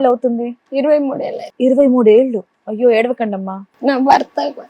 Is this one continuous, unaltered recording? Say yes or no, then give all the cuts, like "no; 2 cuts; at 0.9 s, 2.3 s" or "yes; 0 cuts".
no; 1 cut; at 3.7 s